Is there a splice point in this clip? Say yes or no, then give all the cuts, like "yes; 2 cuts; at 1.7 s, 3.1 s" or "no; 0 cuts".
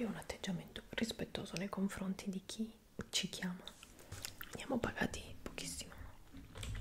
no; 0 cuts